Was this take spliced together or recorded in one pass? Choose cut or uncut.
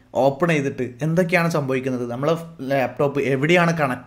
uncut